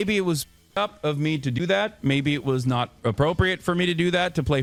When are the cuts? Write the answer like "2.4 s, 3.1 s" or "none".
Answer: none